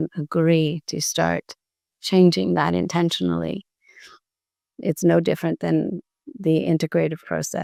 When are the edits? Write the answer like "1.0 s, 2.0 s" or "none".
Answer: none